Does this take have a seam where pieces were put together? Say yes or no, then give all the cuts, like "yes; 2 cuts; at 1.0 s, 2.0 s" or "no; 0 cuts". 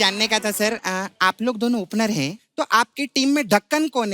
yes; 1 cut; at 2.4 s